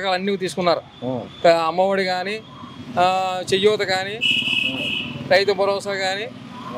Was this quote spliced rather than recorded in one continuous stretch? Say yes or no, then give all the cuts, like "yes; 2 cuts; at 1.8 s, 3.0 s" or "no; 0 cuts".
no; 0 cuts